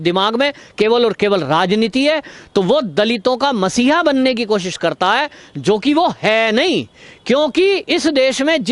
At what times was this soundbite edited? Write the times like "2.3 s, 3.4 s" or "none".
none